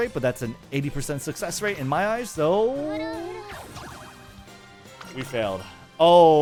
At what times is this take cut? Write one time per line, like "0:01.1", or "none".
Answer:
none